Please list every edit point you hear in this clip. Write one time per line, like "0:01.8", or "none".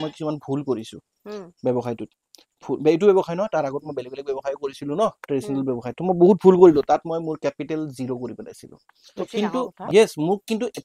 0:09.0